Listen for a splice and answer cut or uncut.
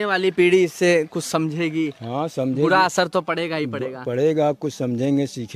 uncut